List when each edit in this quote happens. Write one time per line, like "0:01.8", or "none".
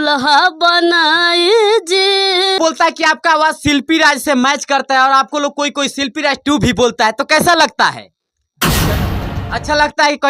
0:02.6